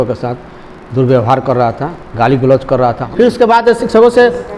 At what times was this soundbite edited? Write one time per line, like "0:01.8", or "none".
0:03.0